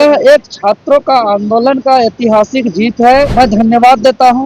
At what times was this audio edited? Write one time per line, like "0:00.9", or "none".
0:03.3